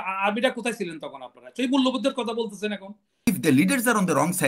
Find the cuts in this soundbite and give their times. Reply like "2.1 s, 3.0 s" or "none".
3.3 s